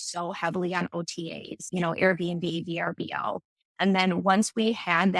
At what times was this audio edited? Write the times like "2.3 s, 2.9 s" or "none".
1.7 s